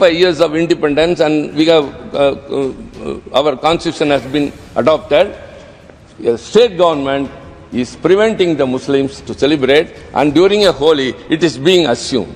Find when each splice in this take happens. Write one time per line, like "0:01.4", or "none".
none